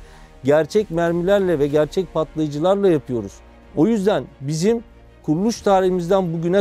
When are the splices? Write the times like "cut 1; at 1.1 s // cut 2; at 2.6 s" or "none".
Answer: none